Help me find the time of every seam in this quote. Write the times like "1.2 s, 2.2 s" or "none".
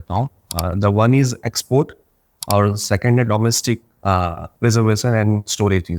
4.4 s